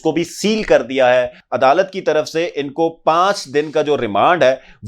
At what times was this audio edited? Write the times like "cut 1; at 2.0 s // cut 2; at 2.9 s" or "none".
cut 1; at 1.4 s